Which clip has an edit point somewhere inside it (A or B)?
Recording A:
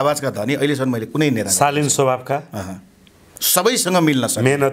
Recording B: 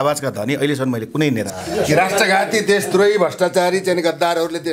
B